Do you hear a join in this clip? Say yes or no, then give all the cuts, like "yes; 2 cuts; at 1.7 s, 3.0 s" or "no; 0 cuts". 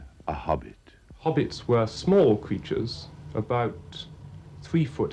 yes; 1 cut; at 2.1 s